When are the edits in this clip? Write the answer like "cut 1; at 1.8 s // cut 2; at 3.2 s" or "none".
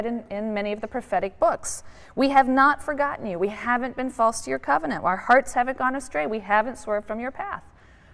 none